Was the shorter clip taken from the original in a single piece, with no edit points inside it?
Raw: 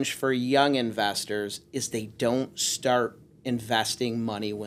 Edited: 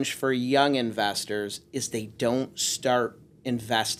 yes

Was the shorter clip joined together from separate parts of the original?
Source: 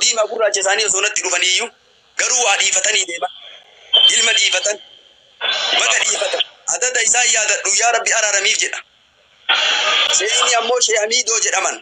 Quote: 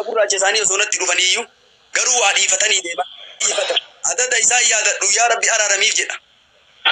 yes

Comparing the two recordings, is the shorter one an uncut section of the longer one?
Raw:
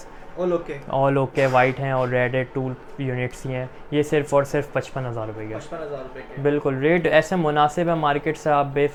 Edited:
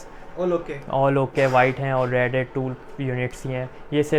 yes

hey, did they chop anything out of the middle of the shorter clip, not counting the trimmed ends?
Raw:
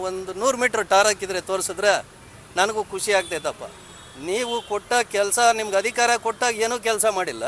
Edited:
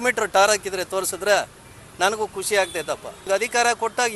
yes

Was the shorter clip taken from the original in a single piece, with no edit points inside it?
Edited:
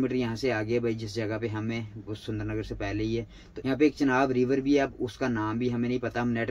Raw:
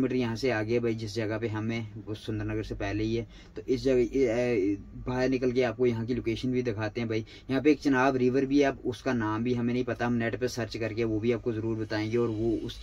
no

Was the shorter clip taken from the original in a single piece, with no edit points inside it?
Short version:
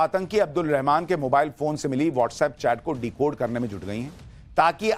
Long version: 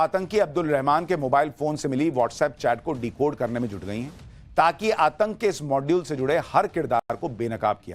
yes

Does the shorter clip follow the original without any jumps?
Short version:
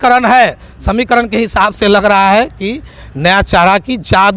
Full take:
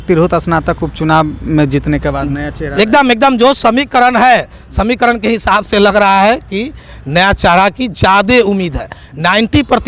yes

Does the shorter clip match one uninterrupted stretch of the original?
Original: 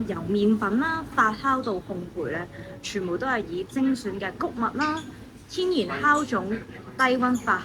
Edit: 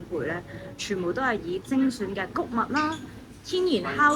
yes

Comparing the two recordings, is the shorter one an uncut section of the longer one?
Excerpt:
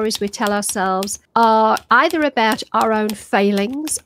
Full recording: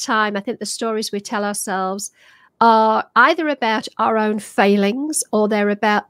no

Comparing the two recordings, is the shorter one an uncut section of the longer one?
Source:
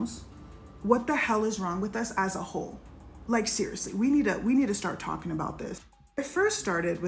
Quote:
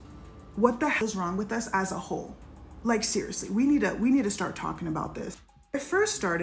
no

